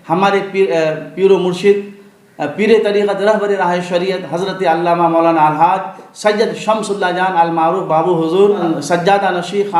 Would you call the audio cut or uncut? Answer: cut